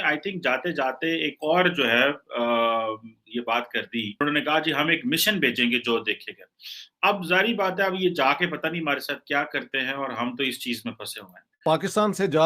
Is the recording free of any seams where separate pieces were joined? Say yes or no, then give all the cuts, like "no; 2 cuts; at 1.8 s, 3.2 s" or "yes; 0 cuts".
no; 2 cuts; at 4.2 s, 11.4 s